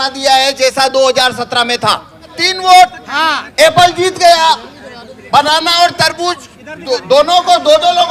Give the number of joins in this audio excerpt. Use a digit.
1